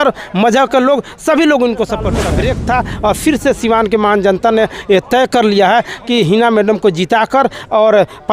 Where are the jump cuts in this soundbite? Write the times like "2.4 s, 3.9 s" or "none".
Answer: 2.2 s